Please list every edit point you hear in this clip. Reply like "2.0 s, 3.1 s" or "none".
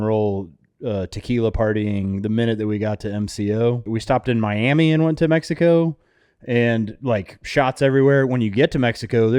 3.9 s